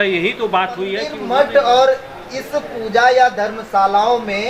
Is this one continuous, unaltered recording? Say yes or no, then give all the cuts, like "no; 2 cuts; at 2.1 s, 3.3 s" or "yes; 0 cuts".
no; 1 cut; at 1.2 s